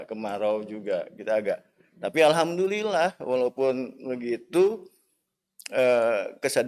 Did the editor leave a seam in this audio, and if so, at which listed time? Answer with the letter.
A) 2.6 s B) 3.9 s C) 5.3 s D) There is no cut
D